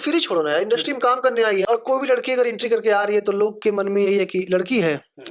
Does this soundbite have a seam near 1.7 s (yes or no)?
yes